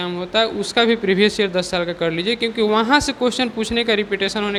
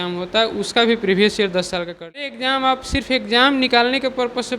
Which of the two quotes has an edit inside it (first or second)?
second